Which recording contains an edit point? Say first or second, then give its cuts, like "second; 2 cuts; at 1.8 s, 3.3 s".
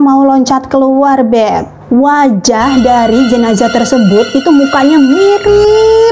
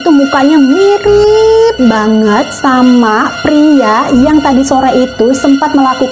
first; 1 cut; at 1.7 s